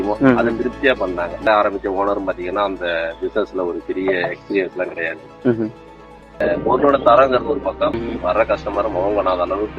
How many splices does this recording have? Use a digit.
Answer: 3